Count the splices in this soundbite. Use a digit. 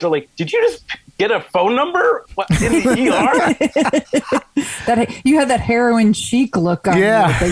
0